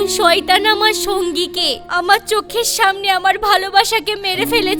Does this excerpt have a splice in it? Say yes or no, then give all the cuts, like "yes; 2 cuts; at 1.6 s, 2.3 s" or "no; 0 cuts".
no; 0 cuts